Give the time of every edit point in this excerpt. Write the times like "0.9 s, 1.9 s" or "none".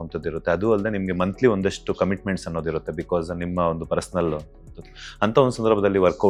none